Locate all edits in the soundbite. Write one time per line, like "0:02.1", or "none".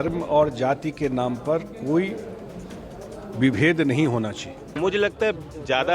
0:04.6